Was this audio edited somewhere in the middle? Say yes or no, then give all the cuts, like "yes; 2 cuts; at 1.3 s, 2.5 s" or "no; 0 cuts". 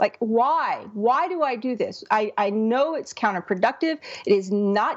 no; 0 cuts